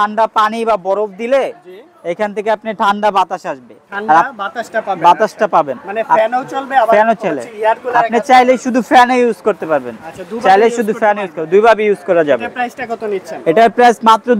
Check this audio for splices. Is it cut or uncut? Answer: uncut